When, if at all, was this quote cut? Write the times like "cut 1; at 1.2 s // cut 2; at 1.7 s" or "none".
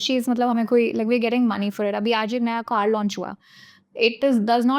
none